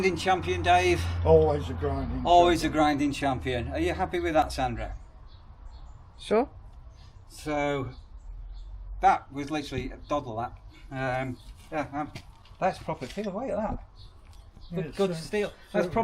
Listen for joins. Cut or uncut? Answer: uncut